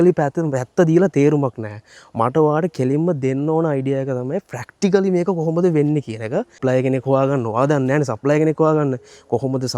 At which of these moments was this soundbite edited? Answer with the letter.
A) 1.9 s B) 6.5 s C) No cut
B